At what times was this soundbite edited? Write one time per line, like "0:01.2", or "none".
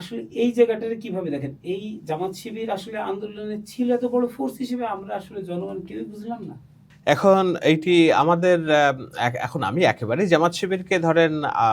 none

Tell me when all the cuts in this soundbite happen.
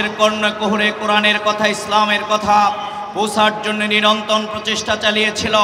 none

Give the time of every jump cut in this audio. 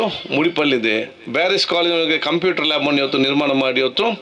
none

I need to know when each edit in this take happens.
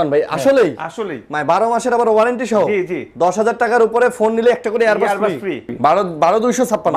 0:05.7

